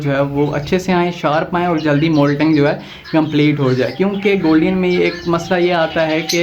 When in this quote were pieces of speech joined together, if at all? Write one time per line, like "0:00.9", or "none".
none